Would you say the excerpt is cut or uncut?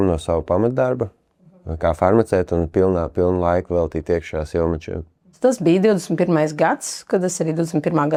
uncut